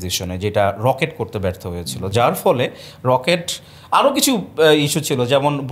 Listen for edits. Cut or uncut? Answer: uncut